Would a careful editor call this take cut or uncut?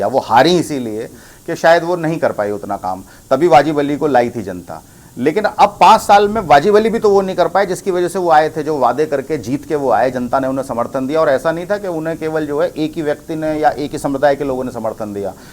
uncut